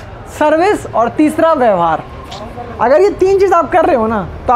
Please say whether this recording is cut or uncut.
uncut